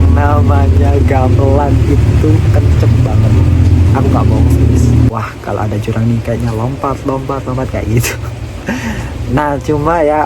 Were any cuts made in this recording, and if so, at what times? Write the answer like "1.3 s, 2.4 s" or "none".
5.1 s